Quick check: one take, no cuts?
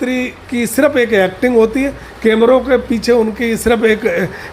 yes; 0 cuts

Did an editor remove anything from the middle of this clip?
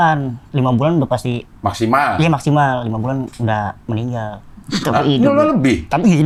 no; 0 cuts

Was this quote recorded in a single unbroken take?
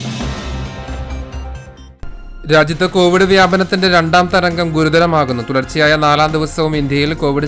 no; 1 cut; at 1.8 s

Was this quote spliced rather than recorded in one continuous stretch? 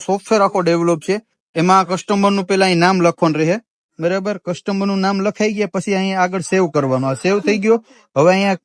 no; 0 cuts

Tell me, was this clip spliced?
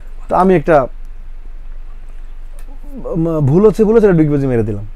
no; 0 cuts

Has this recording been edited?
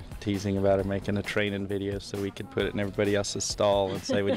no; 0 cuts

